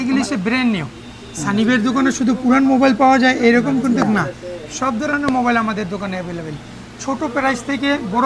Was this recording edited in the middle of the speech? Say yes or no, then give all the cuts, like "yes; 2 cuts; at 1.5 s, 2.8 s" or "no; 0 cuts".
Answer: no; 0 cuts